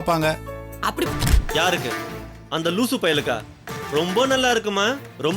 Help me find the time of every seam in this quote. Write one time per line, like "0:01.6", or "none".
0:01.1